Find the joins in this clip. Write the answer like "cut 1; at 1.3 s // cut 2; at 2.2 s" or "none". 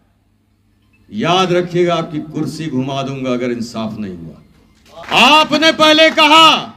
cut 1; at 5.0 s